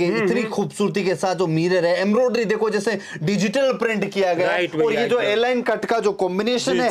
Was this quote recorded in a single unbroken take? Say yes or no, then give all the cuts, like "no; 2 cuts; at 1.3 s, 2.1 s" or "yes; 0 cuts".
yes; 0 cuts